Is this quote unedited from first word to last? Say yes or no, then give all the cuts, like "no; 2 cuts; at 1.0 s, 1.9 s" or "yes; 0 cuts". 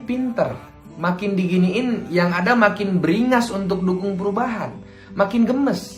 yes; 0 cuts